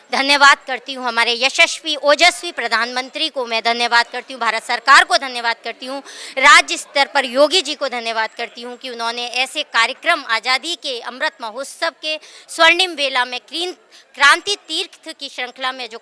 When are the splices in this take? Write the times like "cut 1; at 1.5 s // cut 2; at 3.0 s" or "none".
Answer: none